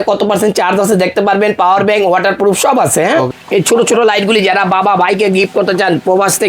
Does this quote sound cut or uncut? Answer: cut